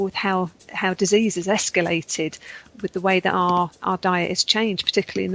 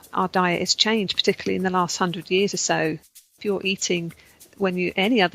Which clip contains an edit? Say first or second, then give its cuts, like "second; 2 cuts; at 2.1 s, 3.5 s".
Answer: second; 1 cut; at 3.2 s